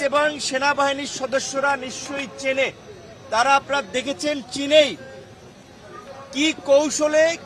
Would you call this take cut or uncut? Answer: uncut